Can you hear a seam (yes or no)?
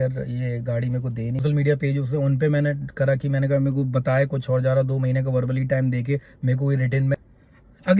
yes